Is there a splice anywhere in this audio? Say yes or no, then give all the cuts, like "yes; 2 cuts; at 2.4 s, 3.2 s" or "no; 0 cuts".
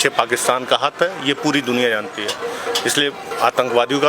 no; 0 cuts